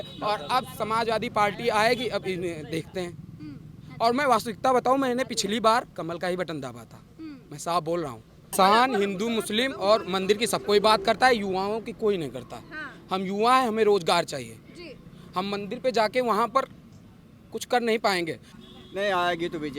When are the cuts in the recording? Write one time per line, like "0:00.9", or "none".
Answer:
0:08.5
0:18.5